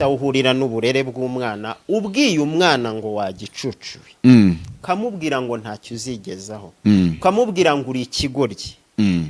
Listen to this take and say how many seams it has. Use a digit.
0